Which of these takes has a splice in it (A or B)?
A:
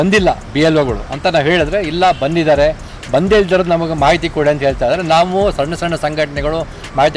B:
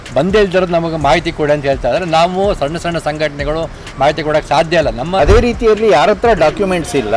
B